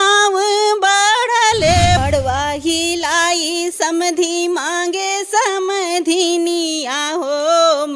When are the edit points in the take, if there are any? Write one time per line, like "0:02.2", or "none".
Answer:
0:02.0